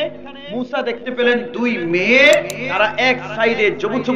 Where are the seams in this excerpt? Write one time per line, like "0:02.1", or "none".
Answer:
0:02.7